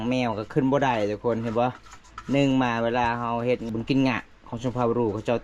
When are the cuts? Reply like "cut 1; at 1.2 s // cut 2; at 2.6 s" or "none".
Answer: cut 1; at 3.7 s